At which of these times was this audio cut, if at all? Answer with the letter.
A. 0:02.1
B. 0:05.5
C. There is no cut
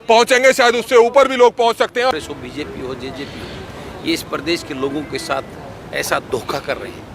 A